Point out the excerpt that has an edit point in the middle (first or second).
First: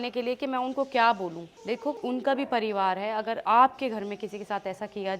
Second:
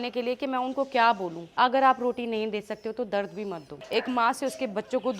second